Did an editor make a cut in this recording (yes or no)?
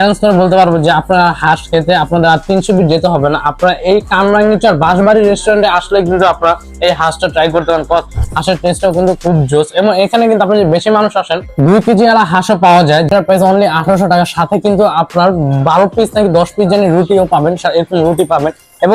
no